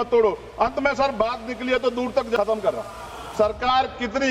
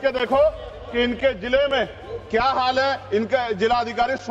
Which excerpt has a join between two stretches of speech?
first; 1 cut; at 2.4 s

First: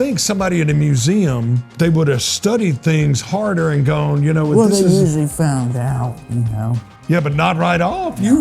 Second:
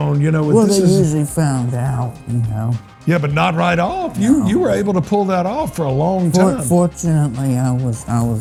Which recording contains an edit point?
first; 1 cut; at 1.6 s

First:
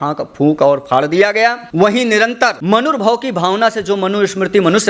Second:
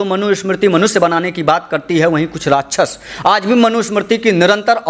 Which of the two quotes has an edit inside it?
first; 2 cuts; at 1.6 s, 2.6 s

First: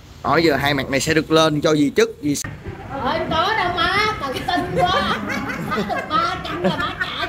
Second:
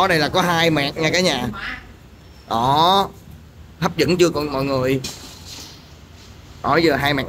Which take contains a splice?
first; 1 cut; at 2.4 s

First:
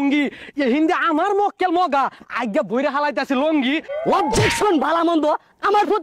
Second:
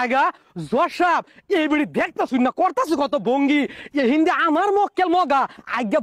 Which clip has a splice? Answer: first; 1 cut; at 3.9 s

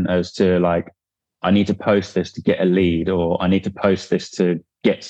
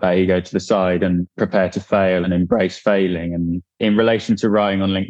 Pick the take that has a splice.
second; 2 cuts; at 2.2 s, 3.6 s

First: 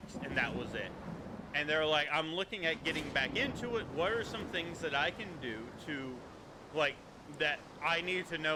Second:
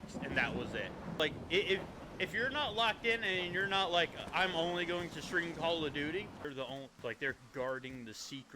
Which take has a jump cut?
second; 2 cuts; at 1.2 s, 6.5 s

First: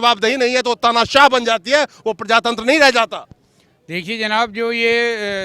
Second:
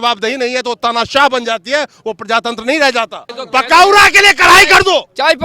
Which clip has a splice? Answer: second; 1 cut; at 3.3 s

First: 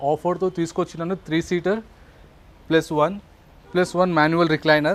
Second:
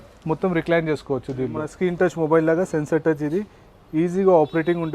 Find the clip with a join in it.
second; 1 cut; at 1.6 s

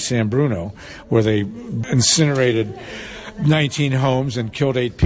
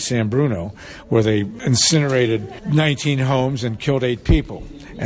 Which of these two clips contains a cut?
second; 2 cuts; at 1.5 s, 2.5 s

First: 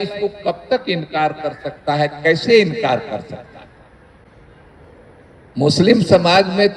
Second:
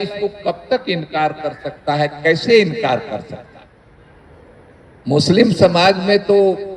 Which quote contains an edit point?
second; 1 cut; at 3.8 s

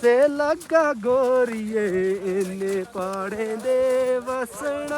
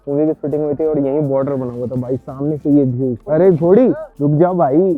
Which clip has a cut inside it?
second; 2 cuts; at 3.2 s, 4.1 s

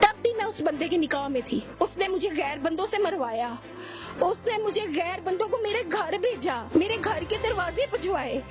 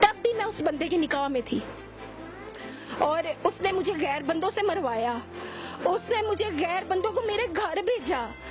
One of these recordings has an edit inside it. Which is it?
first; 2 cuts; at 1.7 s, 6.6 s

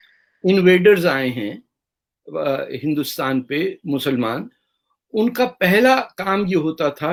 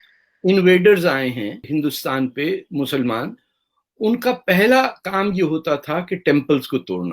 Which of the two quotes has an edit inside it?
second; 1 cut; at 1.6 s

